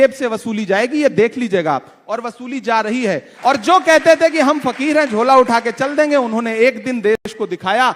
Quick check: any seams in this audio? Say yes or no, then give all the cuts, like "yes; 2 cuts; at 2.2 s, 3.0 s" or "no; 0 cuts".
yes; 1 cut; at 3.3 s